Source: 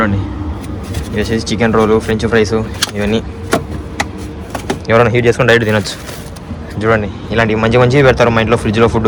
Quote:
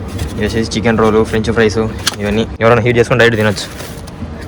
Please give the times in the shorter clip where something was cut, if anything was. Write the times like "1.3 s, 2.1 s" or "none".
2.5 s